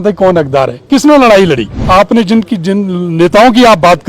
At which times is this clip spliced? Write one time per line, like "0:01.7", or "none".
0:01.7